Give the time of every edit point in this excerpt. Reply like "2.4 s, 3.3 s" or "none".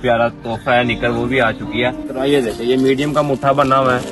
2.0 s